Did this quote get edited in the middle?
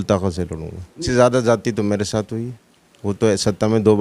yes; 1 cut; at 1.1 s

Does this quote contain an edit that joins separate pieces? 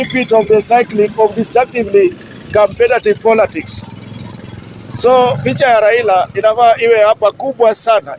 no; 0 cuts

